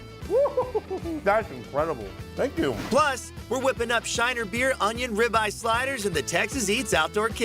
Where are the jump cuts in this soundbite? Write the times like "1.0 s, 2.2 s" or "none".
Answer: 1.2 s, 3.1 s